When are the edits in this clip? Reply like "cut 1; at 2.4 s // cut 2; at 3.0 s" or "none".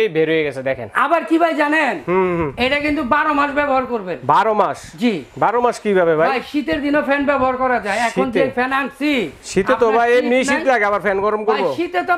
none